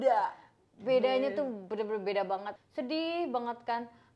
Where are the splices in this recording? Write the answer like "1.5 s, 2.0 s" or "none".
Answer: 2.6 s